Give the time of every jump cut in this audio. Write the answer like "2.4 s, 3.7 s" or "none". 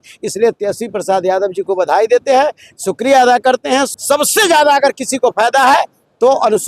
3.9 s